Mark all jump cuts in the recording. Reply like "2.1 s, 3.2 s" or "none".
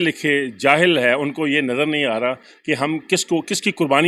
none